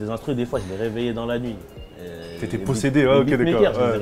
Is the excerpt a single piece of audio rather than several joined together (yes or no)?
yes